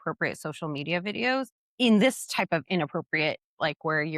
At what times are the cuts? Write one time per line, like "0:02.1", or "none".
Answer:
0:01.6